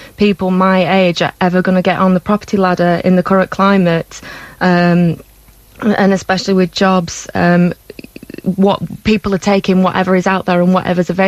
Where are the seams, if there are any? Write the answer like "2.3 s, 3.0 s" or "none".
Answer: none